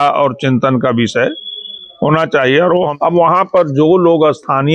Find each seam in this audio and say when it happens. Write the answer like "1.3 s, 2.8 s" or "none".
2.9 s